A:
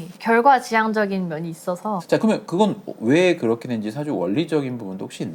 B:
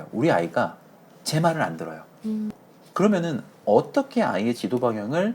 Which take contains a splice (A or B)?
B